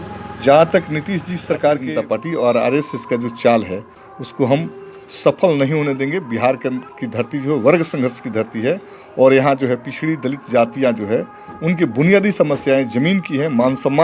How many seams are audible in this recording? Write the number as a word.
one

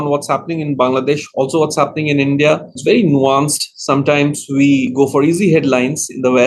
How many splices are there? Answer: two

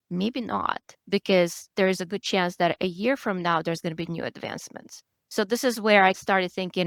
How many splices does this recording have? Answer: zero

